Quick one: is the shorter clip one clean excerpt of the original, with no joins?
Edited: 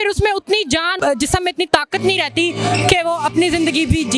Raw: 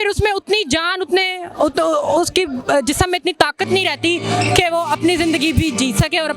no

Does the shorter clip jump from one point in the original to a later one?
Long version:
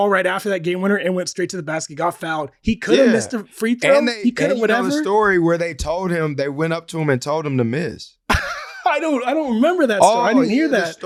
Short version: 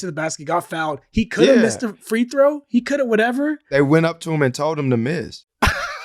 yes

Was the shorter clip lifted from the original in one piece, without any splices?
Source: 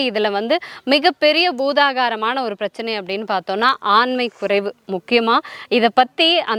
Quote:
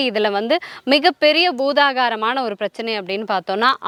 yes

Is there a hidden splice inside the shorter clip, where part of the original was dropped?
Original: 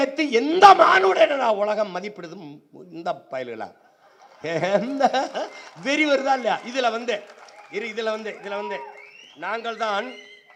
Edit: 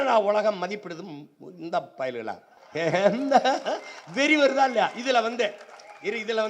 yes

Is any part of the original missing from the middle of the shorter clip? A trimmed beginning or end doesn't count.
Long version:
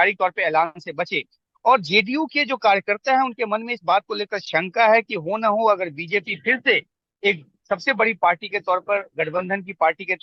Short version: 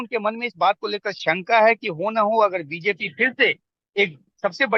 no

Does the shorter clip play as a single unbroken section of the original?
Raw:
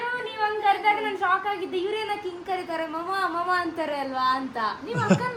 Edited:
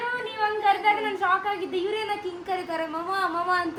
yes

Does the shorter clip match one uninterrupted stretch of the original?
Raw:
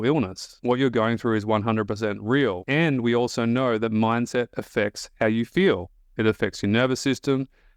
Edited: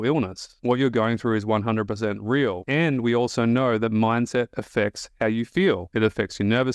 no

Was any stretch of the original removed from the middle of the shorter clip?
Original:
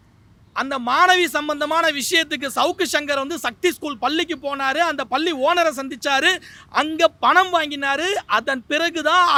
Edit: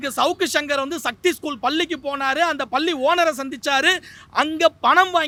no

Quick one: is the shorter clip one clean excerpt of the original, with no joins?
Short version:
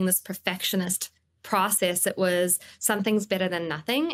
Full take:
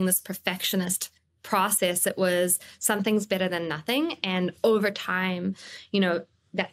yes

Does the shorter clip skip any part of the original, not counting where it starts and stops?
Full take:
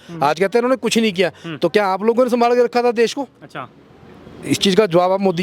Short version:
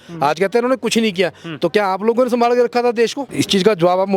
yes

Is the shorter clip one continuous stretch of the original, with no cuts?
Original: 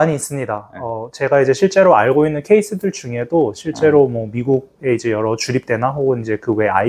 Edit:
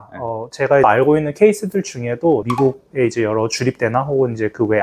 no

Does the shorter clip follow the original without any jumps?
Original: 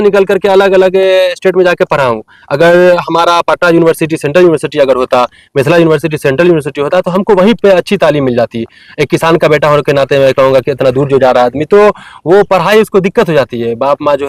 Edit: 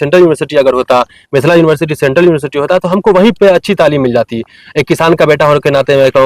yes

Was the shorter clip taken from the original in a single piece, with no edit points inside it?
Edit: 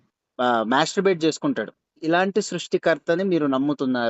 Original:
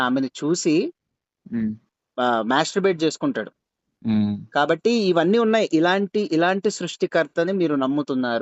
no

